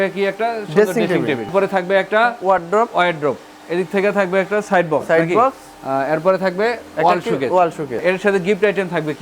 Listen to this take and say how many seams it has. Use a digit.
2